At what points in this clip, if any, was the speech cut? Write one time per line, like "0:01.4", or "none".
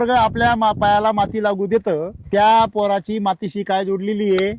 0:02.2